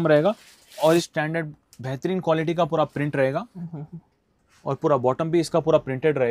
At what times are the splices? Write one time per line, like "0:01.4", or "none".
0:01.1